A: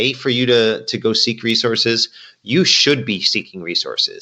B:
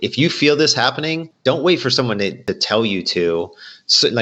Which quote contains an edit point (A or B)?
B